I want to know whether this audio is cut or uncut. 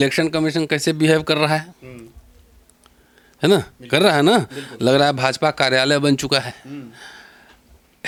uncut